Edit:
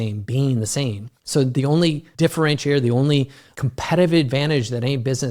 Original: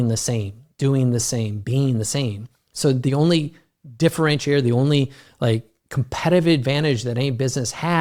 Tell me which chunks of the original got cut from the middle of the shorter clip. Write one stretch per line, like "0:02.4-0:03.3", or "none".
0:02.5-0:02.6
0:03.5-0:03.9
0:05.2-0:05.8